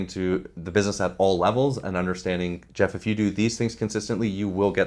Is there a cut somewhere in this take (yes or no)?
no